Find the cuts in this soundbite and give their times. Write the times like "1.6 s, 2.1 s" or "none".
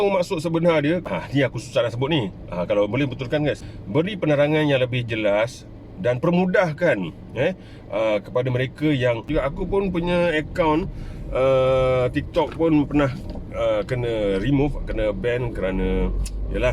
1.0 s, 3.6 s, 9.3 s